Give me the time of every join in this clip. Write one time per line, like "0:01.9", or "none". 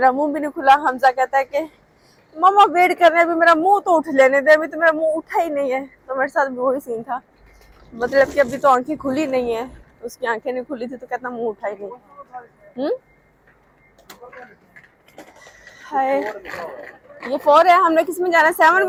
none